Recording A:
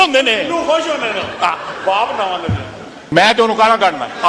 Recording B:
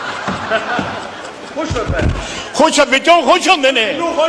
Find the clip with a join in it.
A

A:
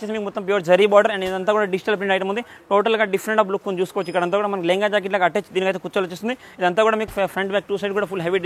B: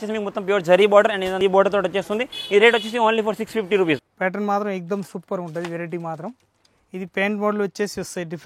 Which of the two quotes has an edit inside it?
B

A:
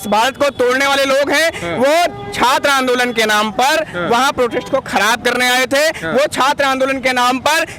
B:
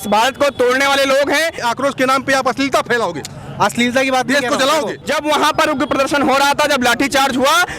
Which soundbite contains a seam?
B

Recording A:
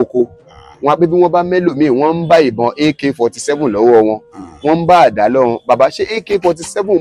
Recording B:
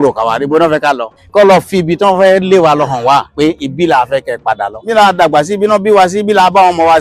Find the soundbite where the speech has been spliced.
B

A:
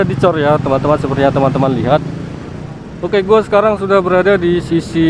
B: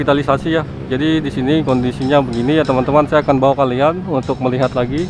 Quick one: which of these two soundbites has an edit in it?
A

